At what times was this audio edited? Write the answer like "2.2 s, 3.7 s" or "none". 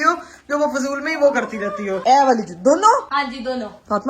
1.9 s, 3.1 s